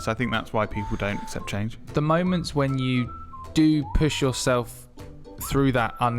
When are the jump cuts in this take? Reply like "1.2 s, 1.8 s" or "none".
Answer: 1.8 s